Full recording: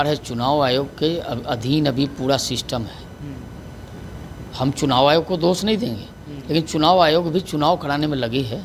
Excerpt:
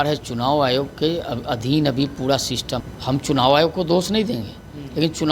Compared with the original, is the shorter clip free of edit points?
no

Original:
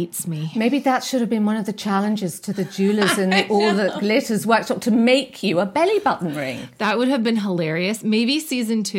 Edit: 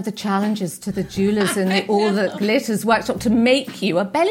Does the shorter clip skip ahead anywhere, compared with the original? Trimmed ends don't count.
no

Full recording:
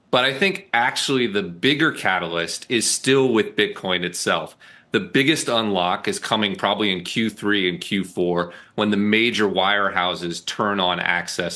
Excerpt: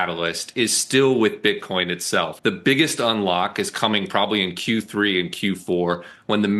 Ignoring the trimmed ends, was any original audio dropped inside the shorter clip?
yes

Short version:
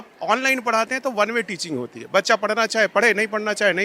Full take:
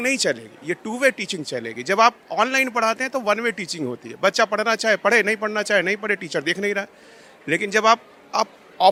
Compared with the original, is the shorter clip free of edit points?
yes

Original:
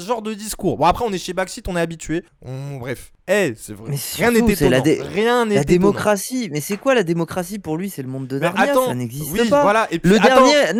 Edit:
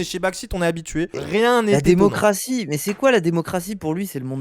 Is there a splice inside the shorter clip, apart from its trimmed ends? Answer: yes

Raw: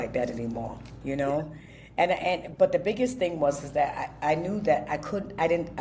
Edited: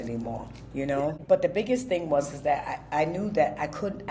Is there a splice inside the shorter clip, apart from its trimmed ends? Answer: yes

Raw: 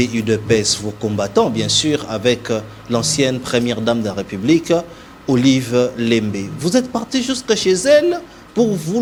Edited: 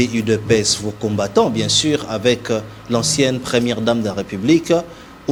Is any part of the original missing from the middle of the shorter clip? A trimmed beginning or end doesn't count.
no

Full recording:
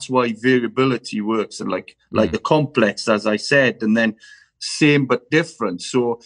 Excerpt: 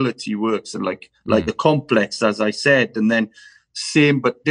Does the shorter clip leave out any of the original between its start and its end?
no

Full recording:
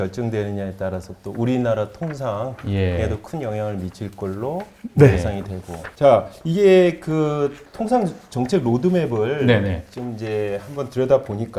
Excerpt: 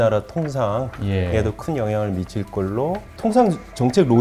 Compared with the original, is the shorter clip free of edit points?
no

